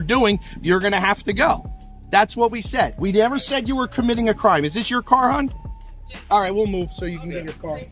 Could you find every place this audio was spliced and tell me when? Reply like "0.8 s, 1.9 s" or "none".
none